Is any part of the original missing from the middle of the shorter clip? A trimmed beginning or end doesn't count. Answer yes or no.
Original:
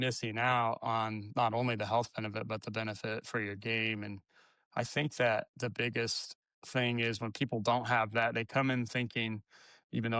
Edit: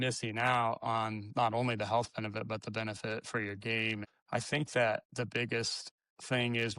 yes